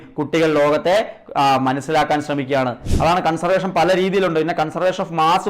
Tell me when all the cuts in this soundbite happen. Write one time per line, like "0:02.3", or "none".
0:02.9